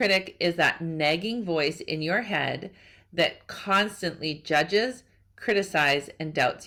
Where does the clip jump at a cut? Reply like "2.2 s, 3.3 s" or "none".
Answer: none